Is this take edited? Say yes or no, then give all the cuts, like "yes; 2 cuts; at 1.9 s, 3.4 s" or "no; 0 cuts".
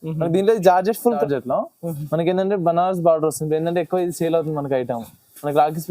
yes; 1 cut; at 1.2 s